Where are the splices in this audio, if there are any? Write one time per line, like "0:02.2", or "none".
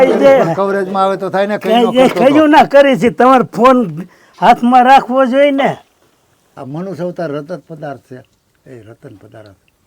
0:06.5